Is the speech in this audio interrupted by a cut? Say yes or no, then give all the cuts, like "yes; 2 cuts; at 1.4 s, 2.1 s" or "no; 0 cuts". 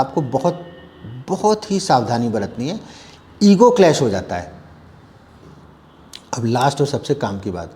yes; 1 cut; at 5.5 s